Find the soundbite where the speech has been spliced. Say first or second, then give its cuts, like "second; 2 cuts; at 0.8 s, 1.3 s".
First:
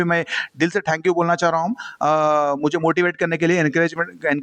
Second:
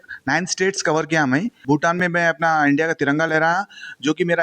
second; 1 cut; at 1.5 s